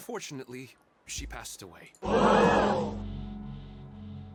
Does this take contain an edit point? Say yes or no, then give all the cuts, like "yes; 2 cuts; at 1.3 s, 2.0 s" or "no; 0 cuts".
no; 0 cuts